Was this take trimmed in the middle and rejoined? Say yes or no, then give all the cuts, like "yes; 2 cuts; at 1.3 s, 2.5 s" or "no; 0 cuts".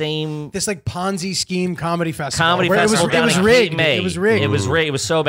no; 0 cuts